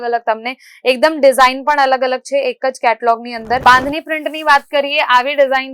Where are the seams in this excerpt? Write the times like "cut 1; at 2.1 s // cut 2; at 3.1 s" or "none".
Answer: cut 1; at 3.6 s